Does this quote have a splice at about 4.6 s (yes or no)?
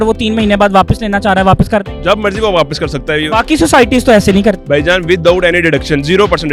yes